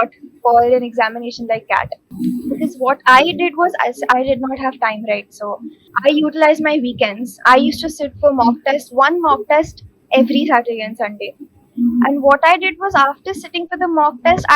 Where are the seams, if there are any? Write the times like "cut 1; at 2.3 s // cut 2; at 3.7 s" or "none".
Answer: cut 1; at 2.0 s // cut 2; at 5.8 s